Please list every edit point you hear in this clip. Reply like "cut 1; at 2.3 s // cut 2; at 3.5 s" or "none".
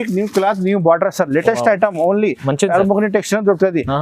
none